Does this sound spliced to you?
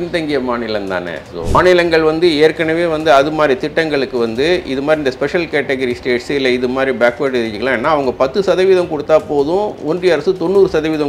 yes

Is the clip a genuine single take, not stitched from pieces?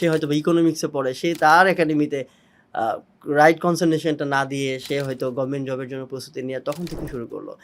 yes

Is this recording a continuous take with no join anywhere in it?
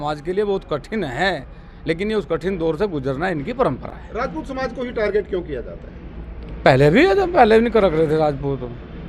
yes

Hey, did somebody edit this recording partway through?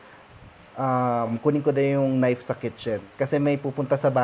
yes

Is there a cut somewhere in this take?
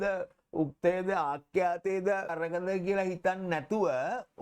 yes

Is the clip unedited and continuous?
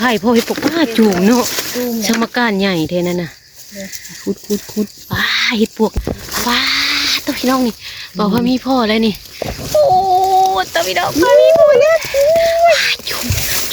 no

